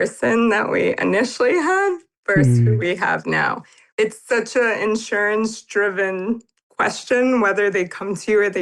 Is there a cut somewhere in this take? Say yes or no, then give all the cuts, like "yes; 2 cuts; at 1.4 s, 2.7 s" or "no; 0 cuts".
yes; 1 cut; at 3.8 s